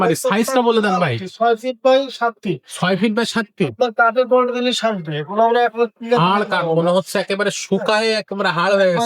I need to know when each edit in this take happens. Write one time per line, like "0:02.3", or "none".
none